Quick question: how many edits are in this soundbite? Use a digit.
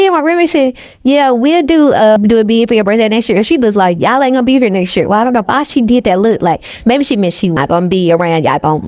2